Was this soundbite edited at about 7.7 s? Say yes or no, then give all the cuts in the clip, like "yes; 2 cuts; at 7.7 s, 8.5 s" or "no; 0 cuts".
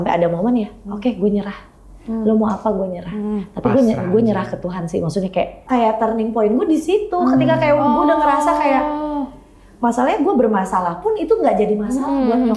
no; 1 cut; at 5.6 s